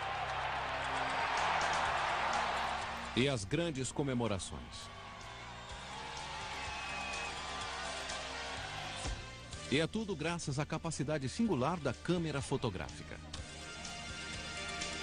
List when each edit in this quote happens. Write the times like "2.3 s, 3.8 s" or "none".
none

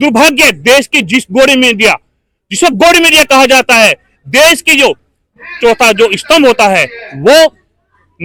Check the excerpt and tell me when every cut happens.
none

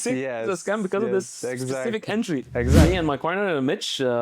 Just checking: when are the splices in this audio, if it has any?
2.8 s

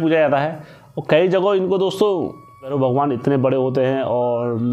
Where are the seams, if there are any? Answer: 2.7 s

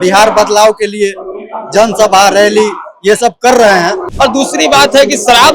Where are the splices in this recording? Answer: 4.0 s

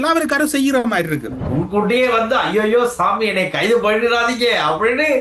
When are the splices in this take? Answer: 1.4 s

